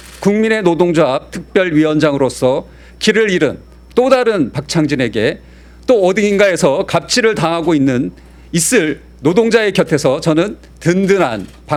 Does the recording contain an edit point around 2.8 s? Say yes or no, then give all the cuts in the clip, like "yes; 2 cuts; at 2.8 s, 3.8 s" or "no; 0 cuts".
no; 0 cuts